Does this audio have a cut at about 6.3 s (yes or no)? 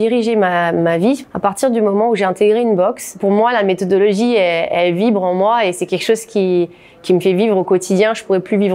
no